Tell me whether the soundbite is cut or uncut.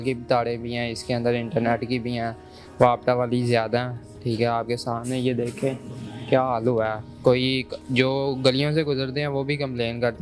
uncut